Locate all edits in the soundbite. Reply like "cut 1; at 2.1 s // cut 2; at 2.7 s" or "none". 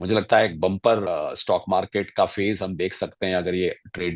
cut 1; at 1.1 s